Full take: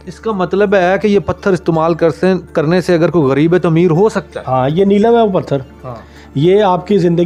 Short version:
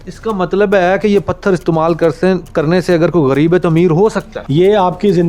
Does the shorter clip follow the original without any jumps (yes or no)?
no